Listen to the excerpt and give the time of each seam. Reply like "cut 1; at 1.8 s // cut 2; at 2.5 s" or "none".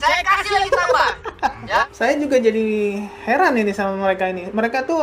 cut 1; at 1.9 s